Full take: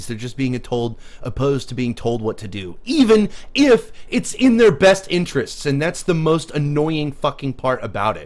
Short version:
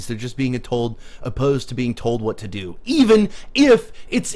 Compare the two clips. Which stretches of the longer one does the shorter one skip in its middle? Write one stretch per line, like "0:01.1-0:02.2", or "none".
none